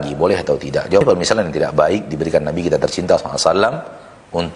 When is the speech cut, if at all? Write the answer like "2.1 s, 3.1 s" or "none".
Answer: 1.0 s